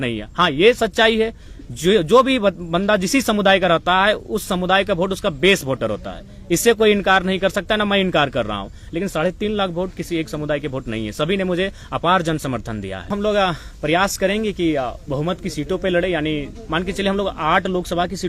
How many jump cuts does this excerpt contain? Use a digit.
1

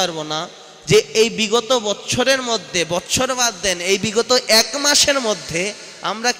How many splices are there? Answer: 0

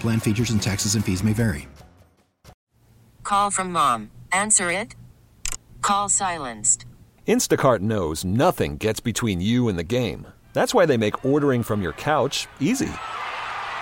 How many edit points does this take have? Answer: 1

